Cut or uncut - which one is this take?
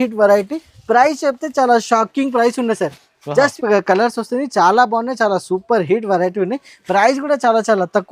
cut